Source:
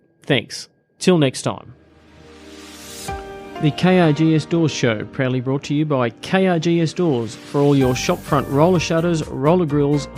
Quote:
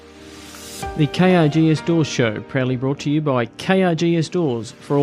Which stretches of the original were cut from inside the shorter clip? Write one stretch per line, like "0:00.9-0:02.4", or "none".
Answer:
0:03.2-0:03.6